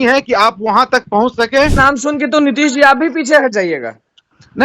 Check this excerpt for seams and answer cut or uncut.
cut